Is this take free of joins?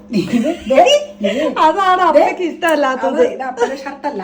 yes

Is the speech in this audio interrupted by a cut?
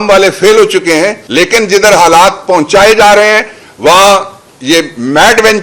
yes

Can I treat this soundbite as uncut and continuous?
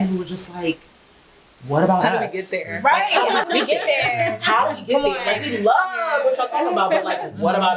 yes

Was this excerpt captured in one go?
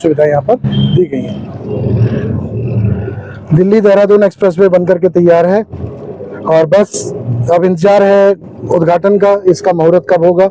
no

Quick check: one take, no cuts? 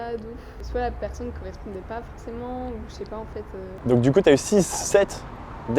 no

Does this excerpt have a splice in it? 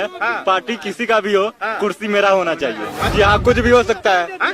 yes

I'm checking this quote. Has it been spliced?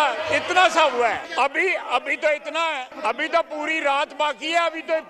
yes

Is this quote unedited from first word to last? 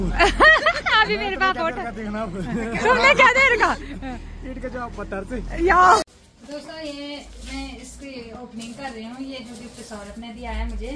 no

